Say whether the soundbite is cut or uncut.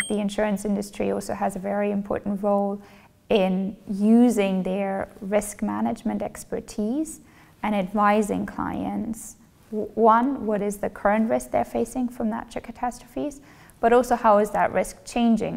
uncut